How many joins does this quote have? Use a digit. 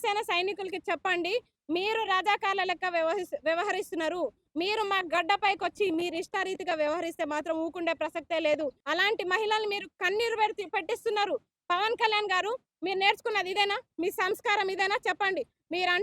1